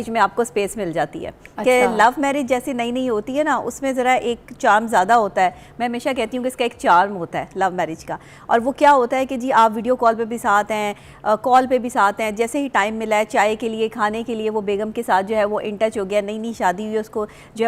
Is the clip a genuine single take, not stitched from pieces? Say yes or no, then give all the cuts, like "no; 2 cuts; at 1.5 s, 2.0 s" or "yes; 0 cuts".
yes; 0 cuts